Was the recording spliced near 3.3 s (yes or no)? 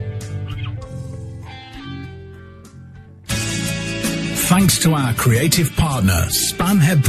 yes